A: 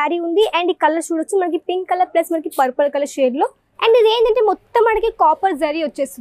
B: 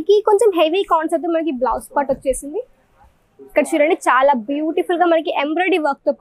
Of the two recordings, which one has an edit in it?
A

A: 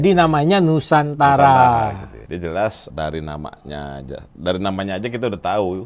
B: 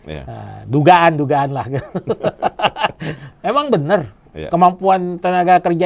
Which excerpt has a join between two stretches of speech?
A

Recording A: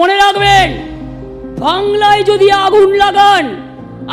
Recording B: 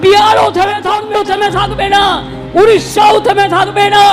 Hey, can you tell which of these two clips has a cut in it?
B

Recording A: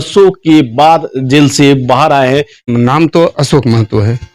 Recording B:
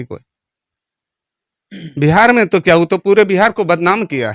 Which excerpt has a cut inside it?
A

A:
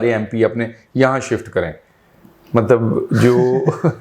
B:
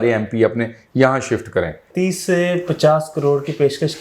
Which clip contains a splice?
B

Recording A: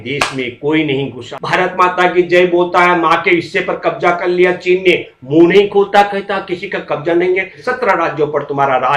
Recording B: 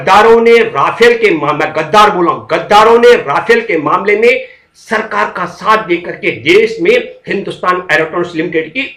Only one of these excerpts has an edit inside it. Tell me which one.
A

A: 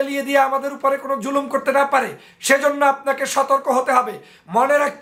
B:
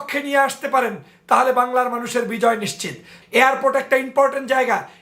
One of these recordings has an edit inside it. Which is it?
B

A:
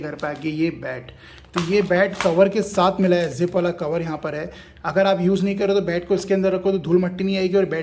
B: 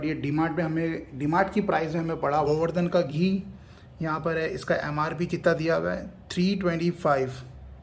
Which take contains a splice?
B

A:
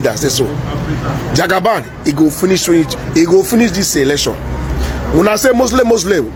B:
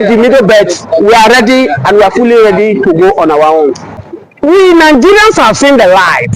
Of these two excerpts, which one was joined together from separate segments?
B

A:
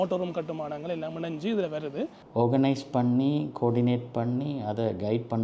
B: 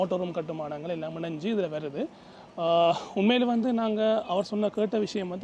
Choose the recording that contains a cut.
A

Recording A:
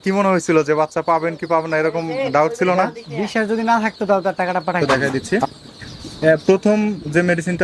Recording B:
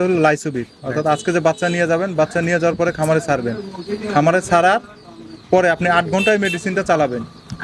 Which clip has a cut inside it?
A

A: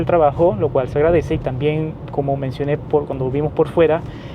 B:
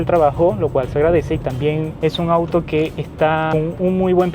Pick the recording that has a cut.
B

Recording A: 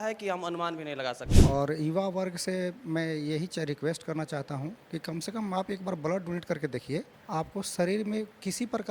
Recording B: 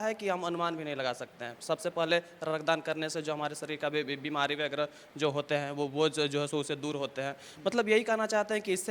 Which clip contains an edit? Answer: A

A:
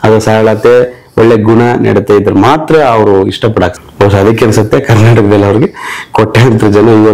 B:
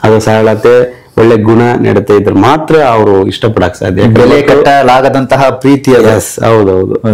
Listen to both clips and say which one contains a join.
A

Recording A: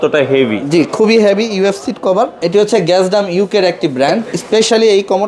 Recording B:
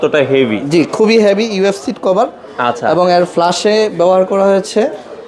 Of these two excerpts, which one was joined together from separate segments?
A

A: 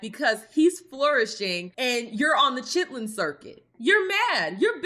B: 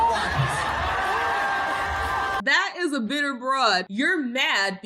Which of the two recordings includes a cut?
B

